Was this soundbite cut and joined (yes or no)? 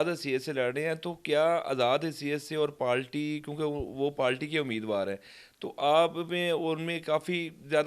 no